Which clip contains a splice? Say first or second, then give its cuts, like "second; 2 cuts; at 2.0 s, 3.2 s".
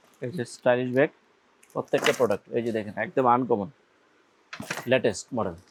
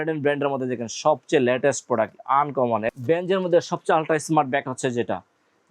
second; 1 cut; at 2.8 s